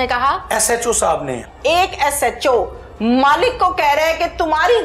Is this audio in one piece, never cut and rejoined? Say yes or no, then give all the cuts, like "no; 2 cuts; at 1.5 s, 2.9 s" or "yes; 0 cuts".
no; 1 cut; at 1.4 s